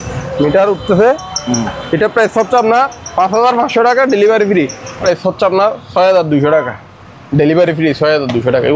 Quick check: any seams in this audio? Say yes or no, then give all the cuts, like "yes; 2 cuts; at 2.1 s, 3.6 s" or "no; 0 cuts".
yes; 1 cut; at 5.0 s